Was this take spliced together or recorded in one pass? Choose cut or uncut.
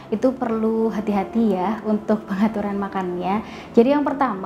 uncut